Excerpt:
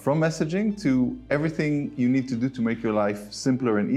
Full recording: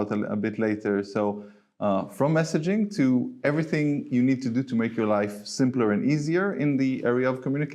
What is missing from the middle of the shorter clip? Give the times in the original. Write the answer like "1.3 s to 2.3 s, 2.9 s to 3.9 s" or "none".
none